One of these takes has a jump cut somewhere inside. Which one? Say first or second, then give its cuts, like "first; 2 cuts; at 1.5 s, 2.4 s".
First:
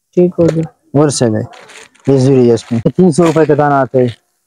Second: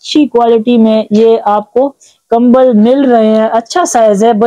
first; 1 cut; at 2.9 s